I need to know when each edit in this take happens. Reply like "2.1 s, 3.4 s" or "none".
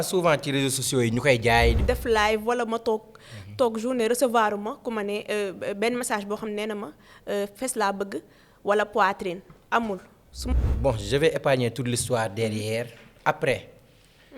1.8 s, 10.5 s